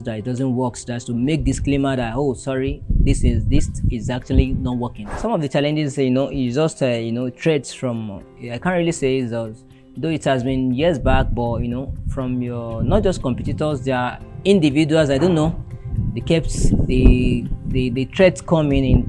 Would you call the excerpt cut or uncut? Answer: cut